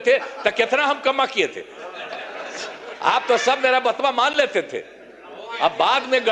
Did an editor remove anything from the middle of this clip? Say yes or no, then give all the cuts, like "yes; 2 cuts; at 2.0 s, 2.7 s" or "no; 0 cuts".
no; 0 cuts